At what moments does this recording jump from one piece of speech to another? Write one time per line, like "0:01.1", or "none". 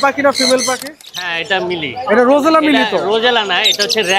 0:01.0